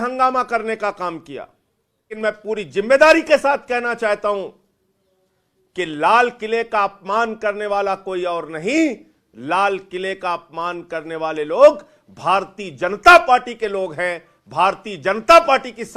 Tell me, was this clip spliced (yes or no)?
yes